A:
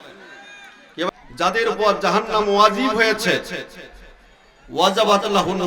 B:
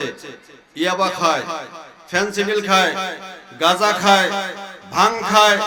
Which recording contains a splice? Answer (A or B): A